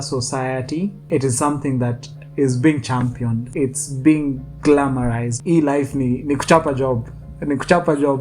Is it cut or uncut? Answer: cut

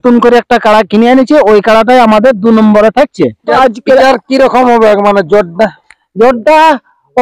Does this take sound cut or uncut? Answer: cut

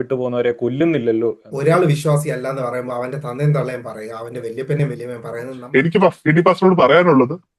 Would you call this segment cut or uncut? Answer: cut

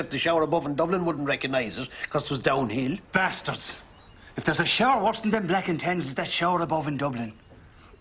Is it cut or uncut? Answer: cut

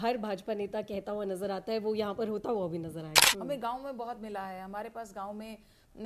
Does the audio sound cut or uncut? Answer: cut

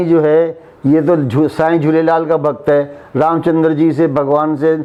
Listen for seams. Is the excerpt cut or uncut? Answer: uncut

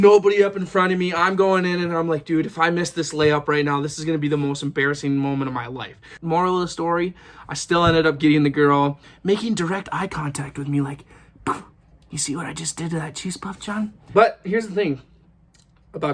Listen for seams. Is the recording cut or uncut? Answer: cut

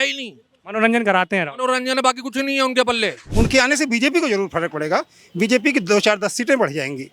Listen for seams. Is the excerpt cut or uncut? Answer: cut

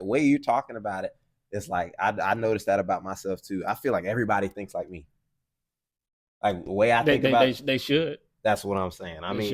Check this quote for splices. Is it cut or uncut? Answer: uncut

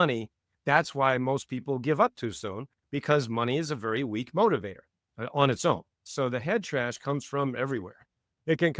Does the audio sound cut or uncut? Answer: uncut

